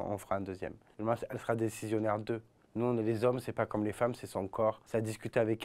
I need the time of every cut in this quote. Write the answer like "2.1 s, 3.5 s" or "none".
none